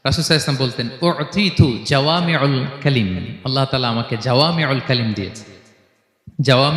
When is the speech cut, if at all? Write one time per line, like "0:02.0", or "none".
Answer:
none